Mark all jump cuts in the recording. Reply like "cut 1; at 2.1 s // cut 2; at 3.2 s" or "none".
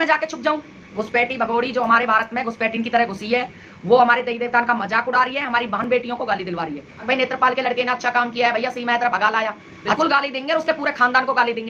cut 1; at 0.9 s // cut 2; at 6.9 s // cut 3; at 10.0 s

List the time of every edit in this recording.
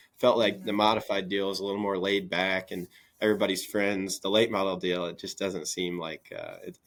none

